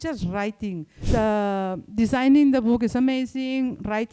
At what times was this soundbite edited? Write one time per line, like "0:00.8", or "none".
0:01.0